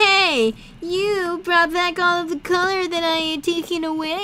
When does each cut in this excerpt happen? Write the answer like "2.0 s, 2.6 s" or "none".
none